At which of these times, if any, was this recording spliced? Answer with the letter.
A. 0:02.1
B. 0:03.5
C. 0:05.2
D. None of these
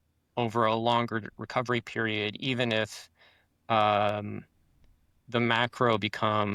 D